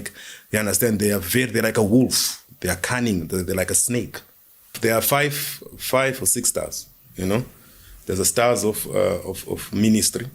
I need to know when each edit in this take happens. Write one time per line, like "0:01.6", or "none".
0:04.7